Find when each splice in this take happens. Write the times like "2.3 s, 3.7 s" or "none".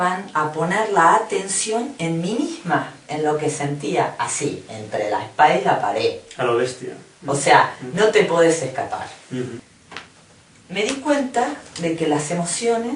9.7 s